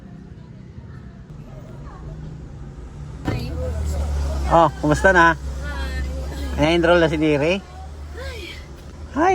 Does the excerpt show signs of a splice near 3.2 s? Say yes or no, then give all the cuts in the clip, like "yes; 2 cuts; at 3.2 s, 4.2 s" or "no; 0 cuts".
yes; 2 cuts; at 1.3 s, 3.2 s